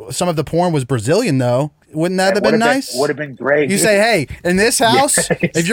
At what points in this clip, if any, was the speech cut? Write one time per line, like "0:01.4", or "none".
0:01.8
0:03.7